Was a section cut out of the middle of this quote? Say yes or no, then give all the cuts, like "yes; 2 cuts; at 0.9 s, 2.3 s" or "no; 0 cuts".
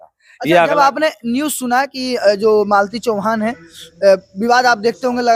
no; 0 cuts